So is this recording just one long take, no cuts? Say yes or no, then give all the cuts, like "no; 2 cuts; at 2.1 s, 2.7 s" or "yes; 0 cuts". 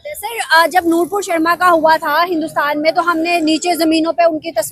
yes; 0 cuts